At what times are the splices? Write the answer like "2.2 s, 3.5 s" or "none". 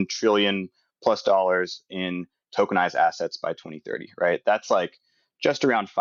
none